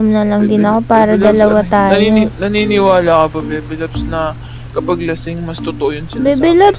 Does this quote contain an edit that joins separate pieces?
no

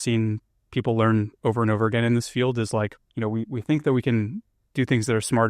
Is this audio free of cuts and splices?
no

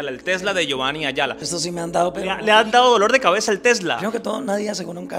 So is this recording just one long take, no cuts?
no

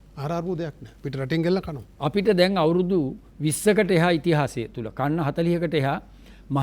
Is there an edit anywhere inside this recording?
yes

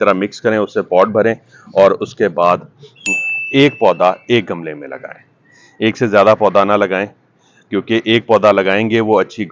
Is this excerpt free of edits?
yes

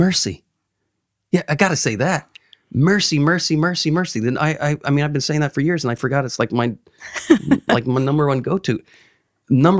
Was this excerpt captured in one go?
yes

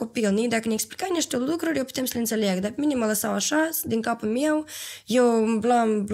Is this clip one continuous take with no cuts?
yes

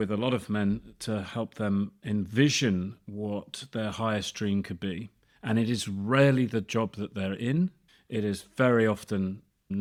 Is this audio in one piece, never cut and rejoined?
yes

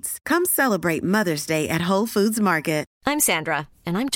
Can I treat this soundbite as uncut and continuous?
no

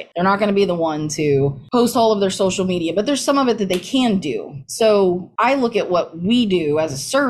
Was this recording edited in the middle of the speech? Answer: no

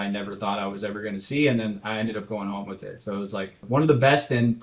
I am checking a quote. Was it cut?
yes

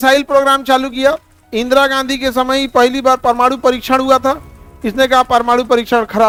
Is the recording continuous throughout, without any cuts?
yes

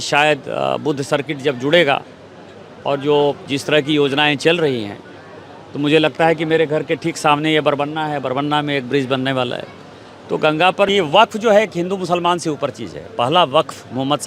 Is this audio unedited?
no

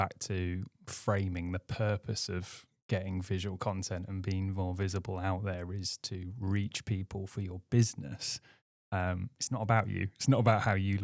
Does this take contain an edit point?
no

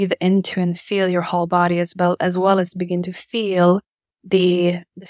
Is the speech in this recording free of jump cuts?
yes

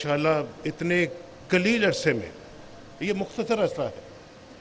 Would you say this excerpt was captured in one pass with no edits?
yes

